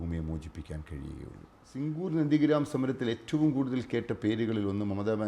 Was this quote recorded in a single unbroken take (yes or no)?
no